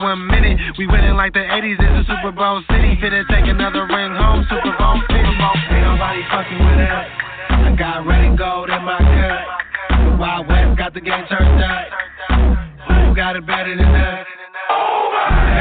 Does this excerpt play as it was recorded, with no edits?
no; 1 cut; at 8.1 s

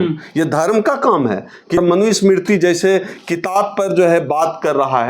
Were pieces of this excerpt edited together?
yes; 1 cut; at 1.8 s

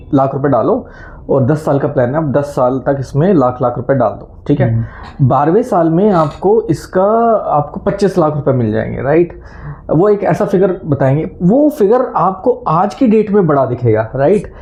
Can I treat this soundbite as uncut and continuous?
yes; 0 cuts

